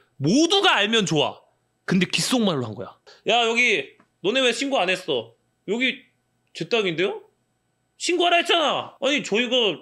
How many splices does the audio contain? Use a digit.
1